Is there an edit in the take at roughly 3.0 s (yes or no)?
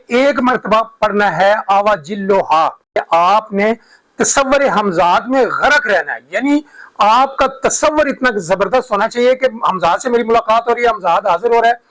yes